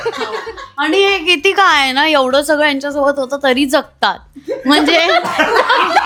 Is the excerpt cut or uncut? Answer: uncut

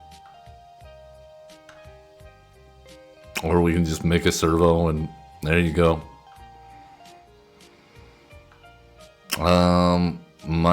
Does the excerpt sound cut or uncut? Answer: cut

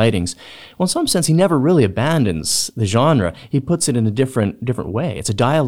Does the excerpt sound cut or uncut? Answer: uncut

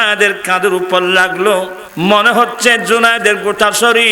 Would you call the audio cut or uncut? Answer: cut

